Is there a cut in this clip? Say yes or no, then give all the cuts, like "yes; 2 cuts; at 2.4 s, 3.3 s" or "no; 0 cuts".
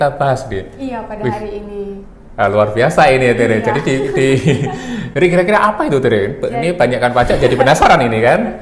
yes; 1 cut; at 5.0 s